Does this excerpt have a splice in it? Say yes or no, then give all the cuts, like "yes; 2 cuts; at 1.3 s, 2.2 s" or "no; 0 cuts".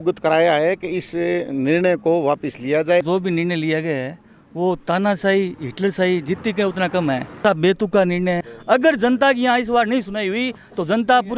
yes; 3 cuts; at 3.0 s, 7.4 s, 8.5 s